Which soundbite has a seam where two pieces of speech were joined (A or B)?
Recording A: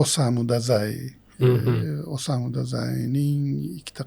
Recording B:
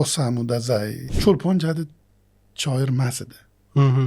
B